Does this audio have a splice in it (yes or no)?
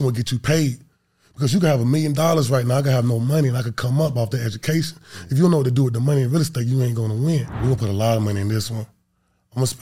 yes